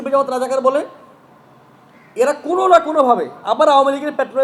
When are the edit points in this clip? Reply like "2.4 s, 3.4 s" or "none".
none